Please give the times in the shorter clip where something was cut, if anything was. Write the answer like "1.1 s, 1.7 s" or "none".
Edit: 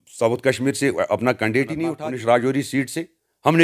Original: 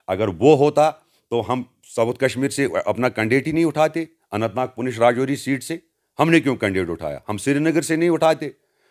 2.0 s